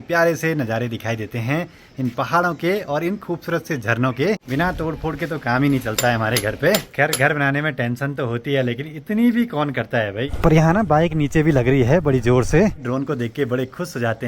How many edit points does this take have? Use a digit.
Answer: 4